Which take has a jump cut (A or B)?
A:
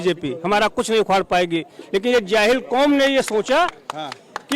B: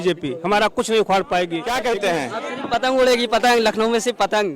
B